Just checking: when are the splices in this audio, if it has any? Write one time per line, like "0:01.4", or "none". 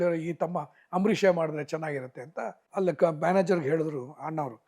0:02.5